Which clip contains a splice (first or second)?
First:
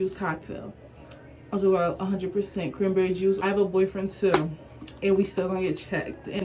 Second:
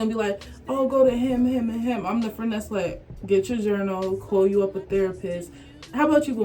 first